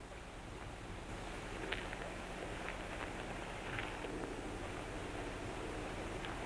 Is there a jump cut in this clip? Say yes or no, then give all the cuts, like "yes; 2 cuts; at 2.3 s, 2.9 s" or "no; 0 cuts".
yes; 1 cut; at 1.1 s